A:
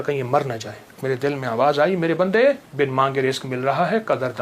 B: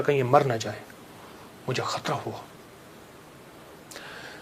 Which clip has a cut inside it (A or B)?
A